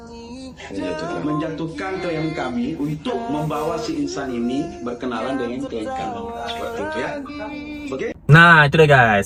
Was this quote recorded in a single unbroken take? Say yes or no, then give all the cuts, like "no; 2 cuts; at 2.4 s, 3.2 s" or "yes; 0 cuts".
yes; 0 cuts